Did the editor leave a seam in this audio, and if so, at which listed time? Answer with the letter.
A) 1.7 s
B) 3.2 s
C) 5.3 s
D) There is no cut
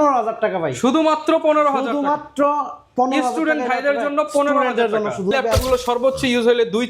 C